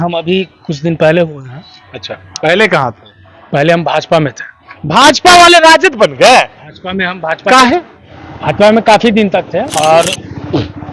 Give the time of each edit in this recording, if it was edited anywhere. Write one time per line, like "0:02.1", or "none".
0:09.7